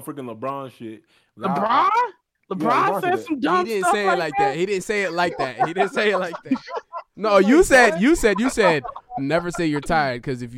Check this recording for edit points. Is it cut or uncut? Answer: cut